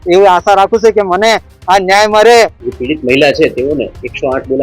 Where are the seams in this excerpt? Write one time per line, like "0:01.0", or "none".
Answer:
0:02.6

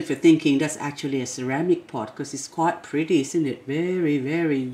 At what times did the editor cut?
none

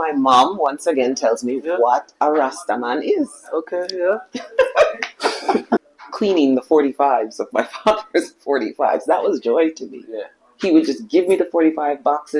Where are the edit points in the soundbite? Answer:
0:05.9

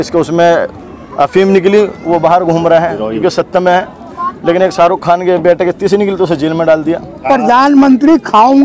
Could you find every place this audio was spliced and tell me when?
0:07.2

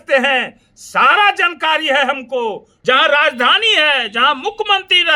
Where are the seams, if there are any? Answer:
0:02.7

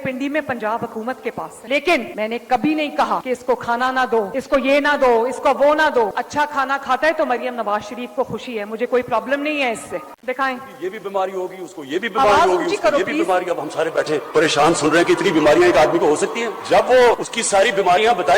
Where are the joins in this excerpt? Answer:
0:10.0

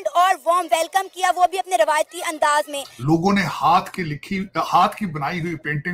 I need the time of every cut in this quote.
0:02.9

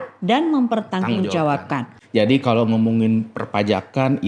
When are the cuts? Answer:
0:01.9

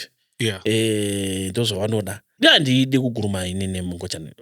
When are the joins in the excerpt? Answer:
0:02.3

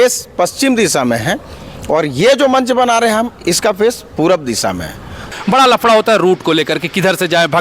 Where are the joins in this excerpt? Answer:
0:05.3

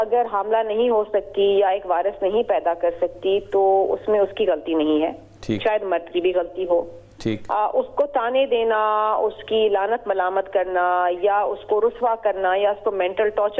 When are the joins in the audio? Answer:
none

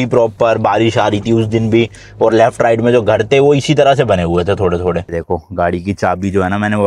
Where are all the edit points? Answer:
0:05.2

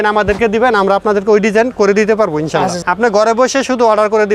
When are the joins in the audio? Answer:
0:02.8

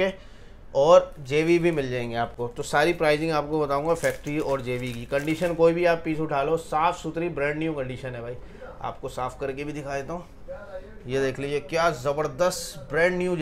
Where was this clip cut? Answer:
none

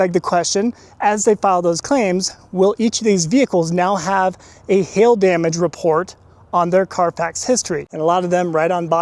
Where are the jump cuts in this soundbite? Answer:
0:07.8

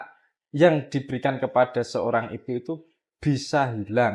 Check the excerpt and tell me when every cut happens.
none

